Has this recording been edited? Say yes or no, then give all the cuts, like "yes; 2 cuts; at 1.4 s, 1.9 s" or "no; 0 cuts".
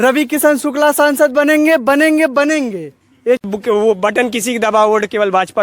yes; 1 cut; at 3.4 s